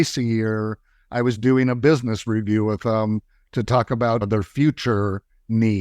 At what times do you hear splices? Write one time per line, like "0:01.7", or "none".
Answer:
0:04.2

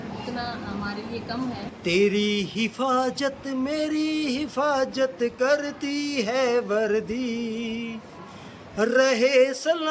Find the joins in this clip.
0:01.7

